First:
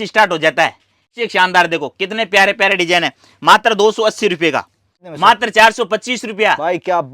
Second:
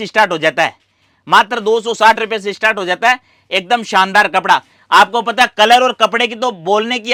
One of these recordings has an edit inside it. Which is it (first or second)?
first